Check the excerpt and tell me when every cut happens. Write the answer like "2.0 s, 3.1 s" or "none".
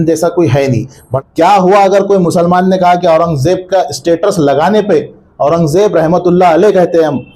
1.0 s